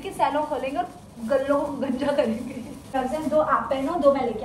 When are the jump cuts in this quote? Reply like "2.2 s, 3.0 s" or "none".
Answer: 2.8 s